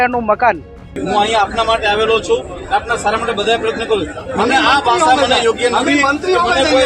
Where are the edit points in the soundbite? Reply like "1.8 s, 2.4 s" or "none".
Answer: 1.0 s